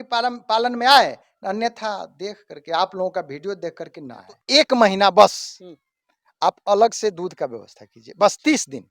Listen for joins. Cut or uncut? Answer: cut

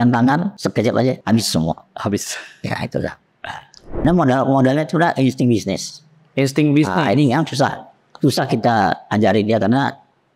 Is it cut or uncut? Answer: cut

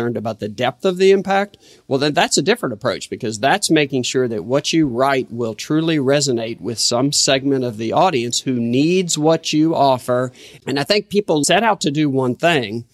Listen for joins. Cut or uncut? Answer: cut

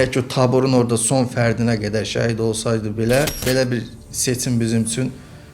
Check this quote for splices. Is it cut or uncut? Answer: cut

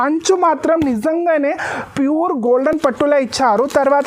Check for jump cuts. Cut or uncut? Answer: uncut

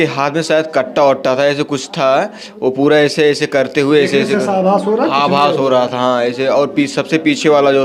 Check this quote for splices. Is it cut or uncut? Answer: uncut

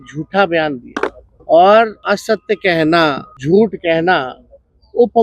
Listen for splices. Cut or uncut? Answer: cut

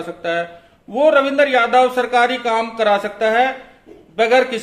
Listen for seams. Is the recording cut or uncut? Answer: uncut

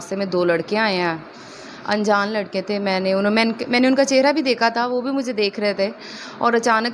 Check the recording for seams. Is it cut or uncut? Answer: uncut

